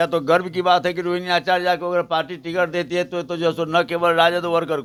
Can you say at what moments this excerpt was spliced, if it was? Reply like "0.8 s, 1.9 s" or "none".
none